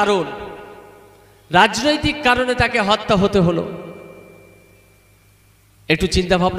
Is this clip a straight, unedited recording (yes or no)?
yes